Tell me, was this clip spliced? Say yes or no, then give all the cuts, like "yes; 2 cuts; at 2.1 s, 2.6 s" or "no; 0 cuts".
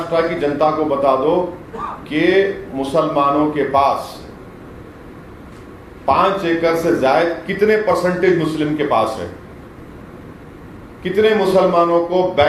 no; 0 cuts